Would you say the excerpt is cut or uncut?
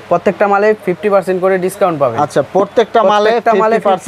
uncut